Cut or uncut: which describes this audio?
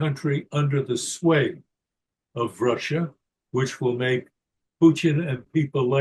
uncut